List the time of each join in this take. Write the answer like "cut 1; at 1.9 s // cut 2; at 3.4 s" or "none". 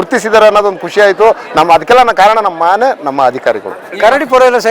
cut 1; at 3.8 s